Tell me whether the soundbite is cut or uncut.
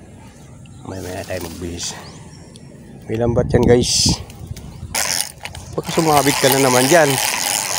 cut